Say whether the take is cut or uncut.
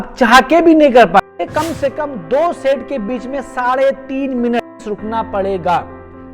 cut